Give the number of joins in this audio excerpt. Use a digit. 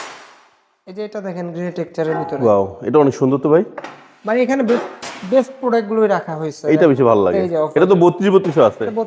0